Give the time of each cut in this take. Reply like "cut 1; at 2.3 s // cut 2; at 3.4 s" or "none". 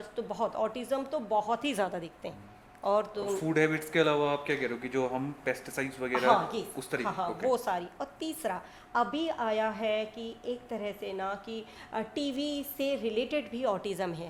none